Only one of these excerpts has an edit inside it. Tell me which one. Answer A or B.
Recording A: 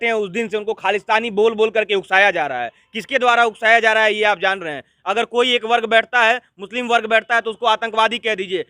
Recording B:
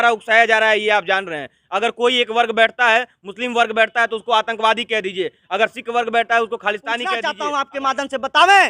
B